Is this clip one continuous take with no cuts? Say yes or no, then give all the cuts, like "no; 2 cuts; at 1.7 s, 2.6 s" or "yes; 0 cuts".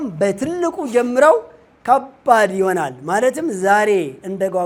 yes; 0 cuts